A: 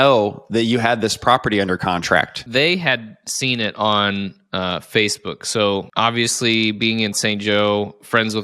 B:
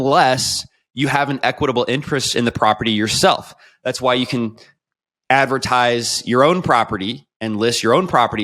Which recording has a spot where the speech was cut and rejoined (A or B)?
A